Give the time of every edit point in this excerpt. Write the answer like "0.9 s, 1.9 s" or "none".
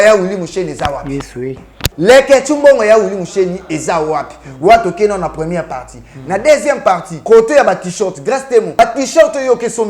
1.8 s, 7.1 s, 8.8 s